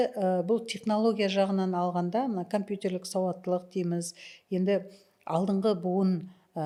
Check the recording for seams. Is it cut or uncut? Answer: uncut